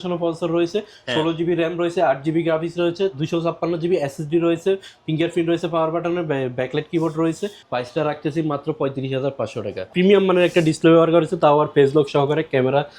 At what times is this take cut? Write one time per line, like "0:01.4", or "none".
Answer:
0:07.5
0:09.9

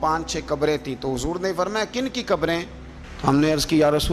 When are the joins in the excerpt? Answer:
none

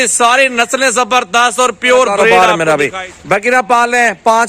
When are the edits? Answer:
0:02.3

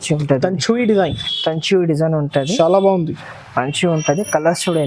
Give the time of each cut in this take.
none

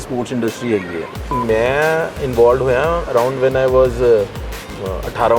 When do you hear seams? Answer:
0:01.4

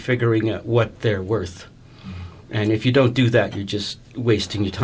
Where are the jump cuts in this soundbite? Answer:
none

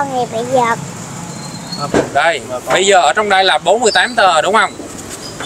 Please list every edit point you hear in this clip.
0:01.8

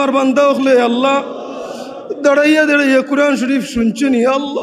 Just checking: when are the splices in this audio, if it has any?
none

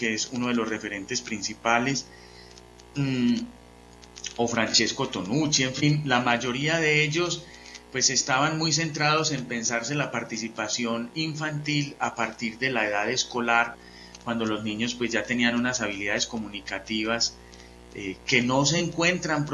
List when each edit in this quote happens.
0:04.2

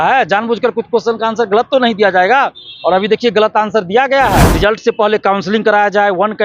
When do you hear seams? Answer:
0:04.5

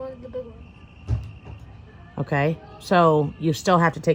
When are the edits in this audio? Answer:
none

